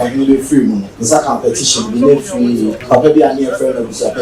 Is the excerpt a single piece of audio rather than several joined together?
no; 2 cuts; at 0.9 s, 2.8 s

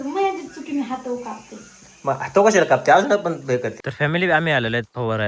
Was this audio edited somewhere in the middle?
yes; 1 cut; at 3.8 s

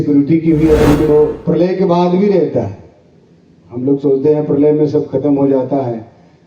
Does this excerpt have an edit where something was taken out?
yes; 1 cut; at 1.1 s

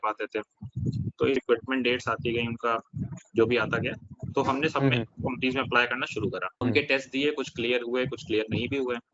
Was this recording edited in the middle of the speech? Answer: yes; 2 cuts; at 1.4 s, 6.6 s

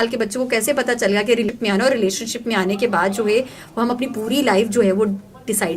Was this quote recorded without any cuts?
no; 1 cut; at 1.5 s

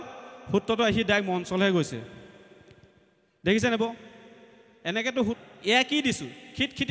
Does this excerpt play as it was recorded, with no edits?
no; 1 cut; at 5.4 s

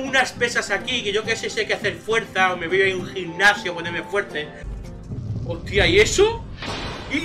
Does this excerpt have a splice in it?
yes; 1 cut; at 4.6 s

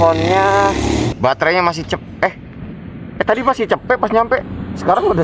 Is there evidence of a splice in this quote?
yes; 1 cut; at 1.1 s

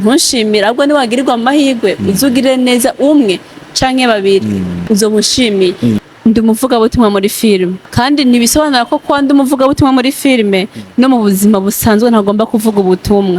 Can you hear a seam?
yes; 3 cuts; at 4.8 s, 6.0 s, 7.8 s

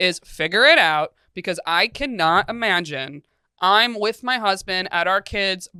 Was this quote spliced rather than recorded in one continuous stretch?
no; 0 cuts

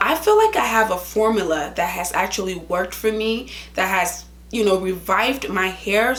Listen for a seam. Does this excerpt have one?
no; 0 cuts

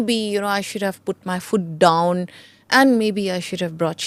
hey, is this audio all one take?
yes; 0 cuts

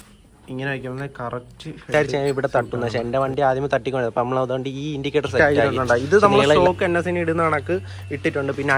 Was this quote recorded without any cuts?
no; 2 cuts; at 1.9 s, 5.4 s

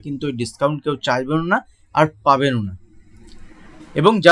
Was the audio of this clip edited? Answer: no; 0 cuts

